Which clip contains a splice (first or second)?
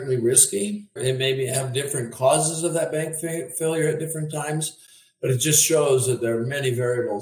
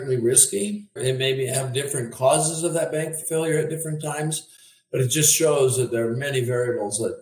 second